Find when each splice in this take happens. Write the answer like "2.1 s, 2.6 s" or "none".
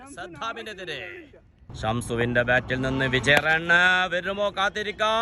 1.7 s